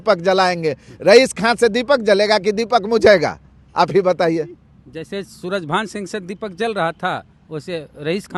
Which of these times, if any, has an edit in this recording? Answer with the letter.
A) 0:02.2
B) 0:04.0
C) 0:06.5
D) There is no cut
D